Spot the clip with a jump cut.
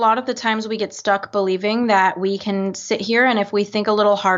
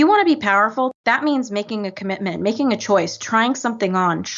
second; 1 cut; at 1.0 s

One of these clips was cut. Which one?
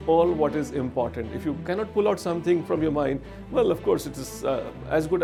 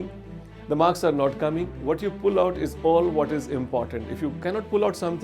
second; 1 cut; at 1.7 s

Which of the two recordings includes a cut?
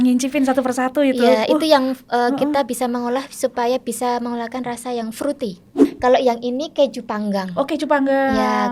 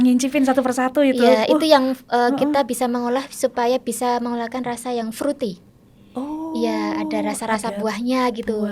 first; 1 cut; at 5.8 s

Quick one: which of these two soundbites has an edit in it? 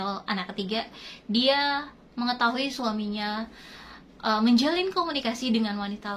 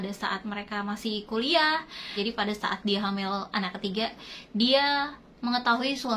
second; 1 cut; at 2.0 s

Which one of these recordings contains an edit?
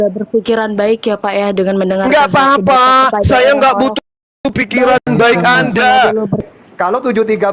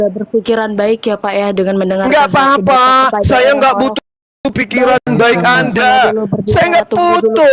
first; 1 cut; at 6.4 s

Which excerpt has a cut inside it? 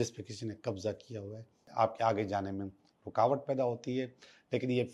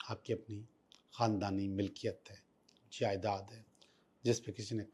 first; 1 cut; at 1.6 s

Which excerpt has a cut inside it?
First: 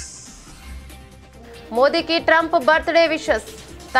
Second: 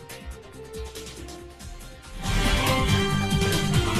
first; 1 cut; at 1.7 s

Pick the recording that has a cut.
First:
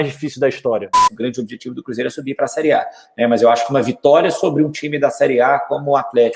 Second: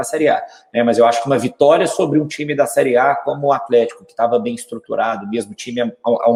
first; 1 cut; at 1.1 s

